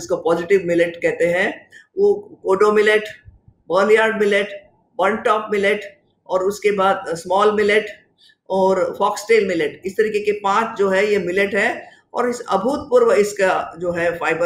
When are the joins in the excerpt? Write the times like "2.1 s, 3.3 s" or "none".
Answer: none